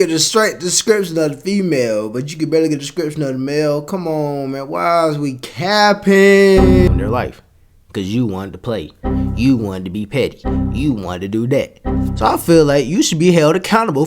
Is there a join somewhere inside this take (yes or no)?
yes